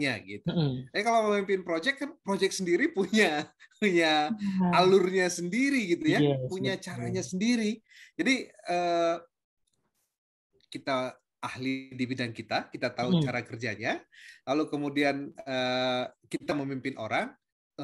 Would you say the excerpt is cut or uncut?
uncut